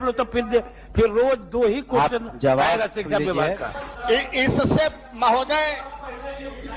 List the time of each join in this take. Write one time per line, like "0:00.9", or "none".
0:04.0